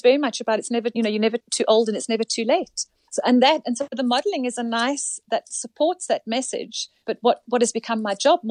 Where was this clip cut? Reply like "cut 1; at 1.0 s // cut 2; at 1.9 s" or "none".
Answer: none